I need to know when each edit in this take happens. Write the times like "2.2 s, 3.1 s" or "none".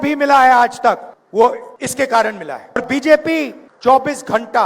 1.1 s, 1.7 s, 2.8 s, 3.6 s